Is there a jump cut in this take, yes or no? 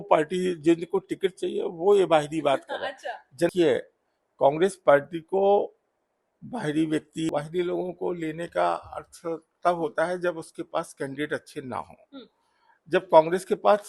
yes